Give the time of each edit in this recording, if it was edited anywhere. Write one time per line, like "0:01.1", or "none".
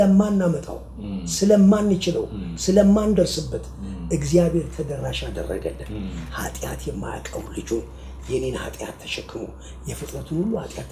none